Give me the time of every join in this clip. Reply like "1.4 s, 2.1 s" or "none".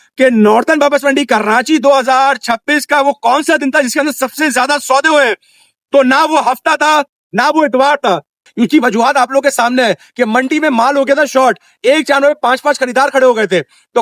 8.4 s